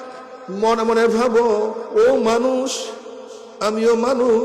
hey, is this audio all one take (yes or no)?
yes